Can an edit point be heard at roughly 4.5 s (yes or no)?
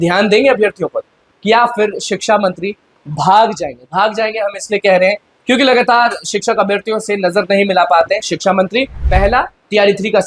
no